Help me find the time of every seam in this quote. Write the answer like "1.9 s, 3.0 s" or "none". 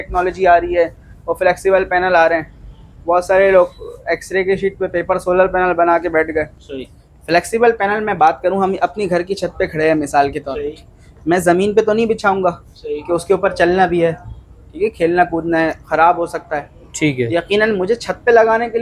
6.5 s

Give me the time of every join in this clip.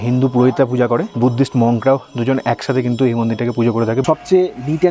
1.1 s, 4.0 s

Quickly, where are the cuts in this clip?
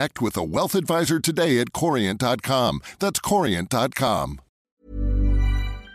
4.6 s

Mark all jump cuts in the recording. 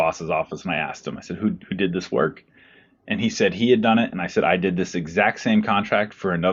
none

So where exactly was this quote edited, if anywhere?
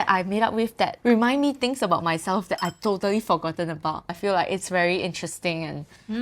1.0 s, 4.1 s

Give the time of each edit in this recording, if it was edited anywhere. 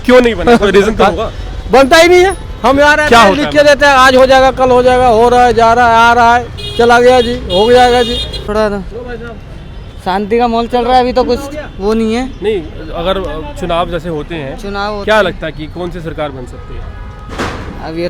8.4 s

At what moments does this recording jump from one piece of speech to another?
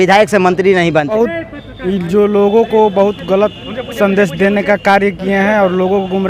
1.2 s

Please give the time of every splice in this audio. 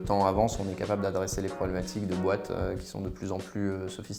none

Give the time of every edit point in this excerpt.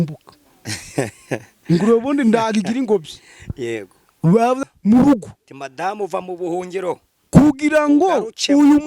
4.6 s

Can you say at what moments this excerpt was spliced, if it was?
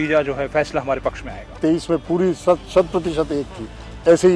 1.4 s

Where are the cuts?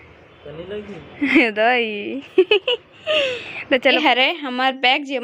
4.0 s

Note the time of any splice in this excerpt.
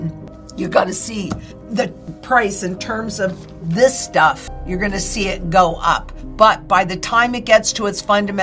none

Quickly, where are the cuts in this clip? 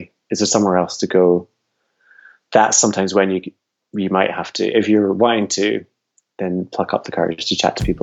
none

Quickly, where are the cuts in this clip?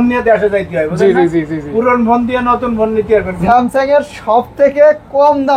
3.4 s

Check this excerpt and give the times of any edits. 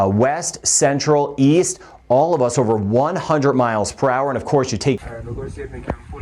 5.0 s

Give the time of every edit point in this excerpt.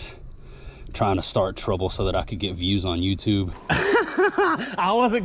3.6 s

